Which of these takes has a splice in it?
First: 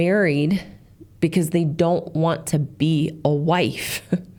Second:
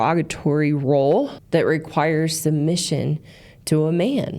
second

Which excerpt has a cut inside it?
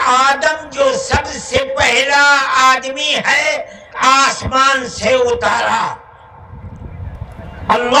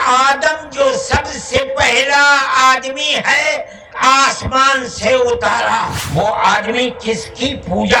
second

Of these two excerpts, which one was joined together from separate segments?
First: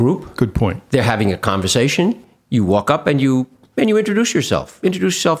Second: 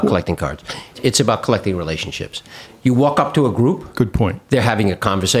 second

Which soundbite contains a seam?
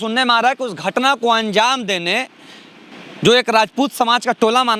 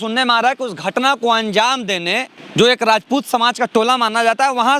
second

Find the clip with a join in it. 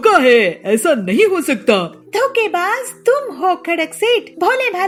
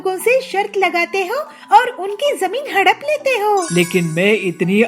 second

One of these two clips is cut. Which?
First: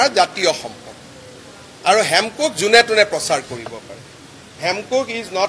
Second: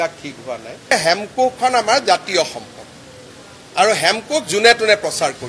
second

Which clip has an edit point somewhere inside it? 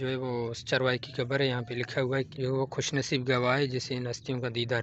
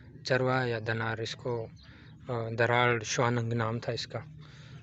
first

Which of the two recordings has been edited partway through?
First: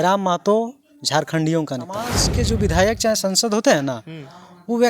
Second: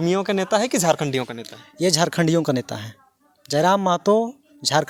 first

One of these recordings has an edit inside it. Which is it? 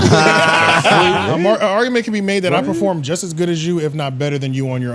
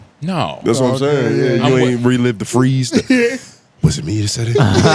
first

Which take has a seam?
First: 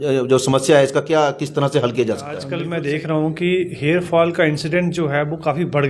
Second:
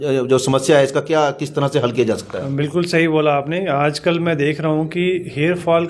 first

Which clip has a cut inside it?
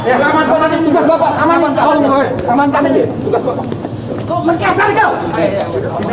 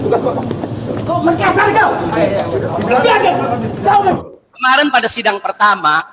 second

